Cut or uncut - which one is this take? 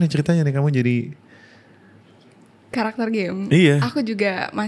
uncut